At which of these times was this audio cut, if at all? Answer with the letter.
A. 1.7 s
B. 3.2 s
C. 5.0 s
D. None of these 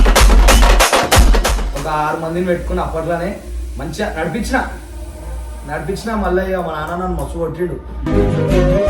A